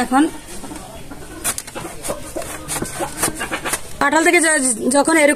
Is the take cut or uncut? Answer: cut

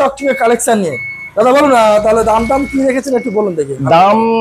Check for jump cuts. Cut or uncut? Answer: uncut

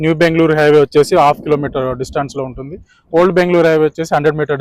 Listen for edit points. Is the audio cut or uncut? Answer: uncut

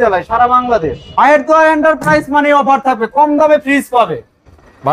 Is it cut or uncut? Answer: cut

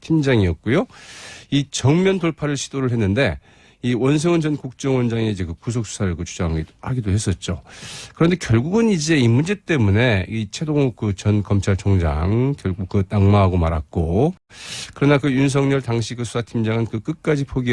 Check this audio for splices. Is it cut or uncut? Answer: cut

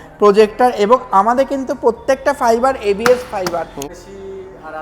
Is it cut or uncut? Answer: cut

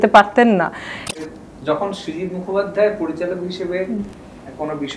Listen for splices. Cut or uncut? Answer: cut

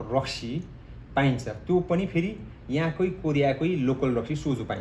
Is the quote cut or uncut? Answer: uncut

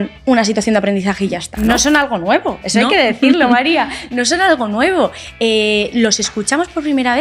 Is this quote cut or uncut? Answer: cut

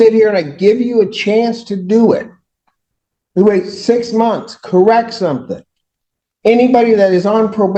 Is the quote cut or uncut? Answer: uncut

